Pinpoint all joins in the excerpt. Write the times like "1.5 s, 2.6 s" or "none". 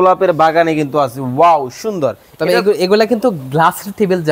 none